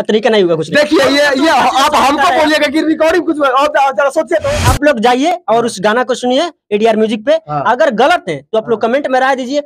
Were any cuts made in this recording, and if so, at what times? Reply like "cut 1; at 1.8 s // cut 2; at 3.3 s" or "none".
cut 1; at 4.6 s